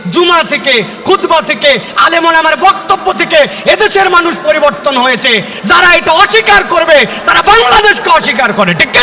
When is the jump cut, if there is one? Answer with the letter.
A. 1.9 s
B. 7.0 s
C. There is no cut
C